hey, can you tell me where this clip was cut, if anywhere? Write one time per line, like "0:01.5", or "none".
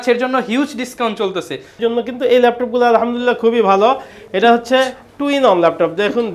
0:01.8

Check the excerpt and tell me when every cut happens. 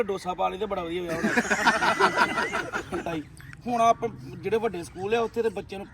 0:03.1

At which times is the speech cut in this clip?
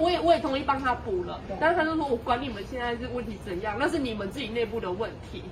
none

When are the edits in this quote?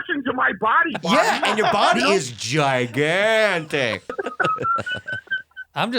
0:04.1

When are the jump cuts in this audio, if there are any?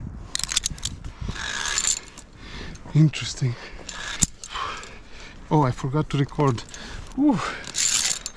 none

